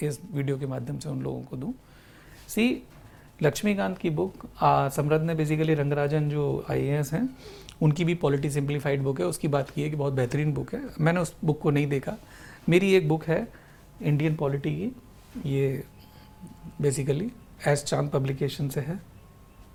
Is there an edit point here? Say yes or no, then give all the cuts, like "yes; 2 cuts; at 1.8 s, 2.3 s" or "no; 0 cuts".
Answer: no; 0 cuts